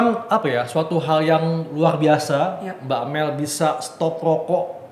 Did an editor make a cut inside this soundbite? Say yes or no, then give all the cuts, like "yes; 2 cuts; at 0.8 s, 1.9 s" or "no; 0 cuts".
no; 0 cuts